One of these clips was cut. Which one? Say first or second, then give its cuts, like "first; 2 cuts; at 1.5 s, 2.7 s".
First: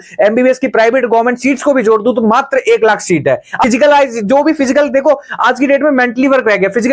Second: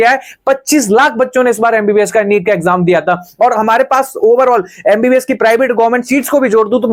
first; 1 cut; at 3.6 s